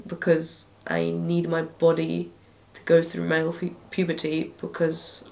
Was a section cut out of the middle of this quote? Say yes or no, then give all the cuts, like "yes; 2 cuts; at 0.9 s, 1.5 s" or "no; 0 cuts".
no; 0 cuts